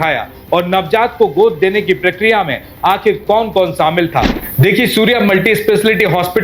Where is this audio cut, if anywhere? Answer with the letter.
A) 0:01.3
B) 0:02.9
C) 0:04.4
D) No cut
C